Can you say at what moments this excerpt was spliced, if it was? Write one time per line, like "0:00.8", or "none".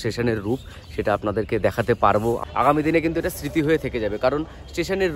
0:02.4